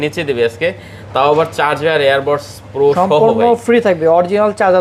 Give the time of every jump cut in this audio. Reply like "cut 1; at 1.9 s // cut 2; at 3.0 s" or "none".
none